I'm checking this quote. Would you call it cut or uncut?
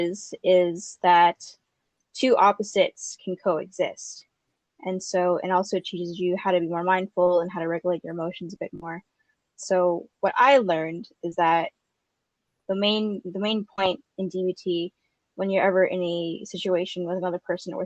uncut